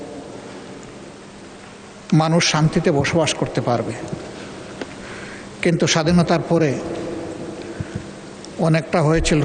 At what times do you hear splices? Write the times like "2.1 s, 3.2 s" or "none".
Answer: none